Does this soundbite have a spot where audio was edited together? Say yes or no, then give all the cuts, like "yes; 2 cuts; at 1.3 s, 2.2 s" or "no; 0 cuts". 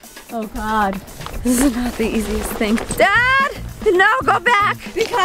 yes; 1 cut; at 2.9 s